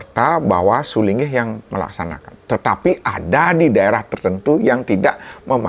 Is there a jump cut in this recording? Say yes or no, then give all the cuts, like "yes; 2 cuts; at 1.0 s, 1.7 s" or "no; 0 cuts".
no; 0 cuts